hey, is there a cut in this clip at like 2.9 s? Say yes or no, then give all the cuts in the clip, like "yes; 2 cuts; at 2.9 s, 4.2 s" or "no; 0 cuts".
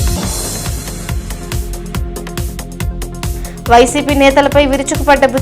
yes; 1 cut; at 2.9 s